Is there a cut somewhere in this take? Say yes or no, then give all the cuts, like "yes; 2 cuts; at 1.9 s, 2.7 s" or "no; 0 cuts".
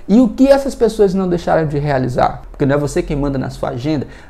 yes; 1 cut; at 2.4 s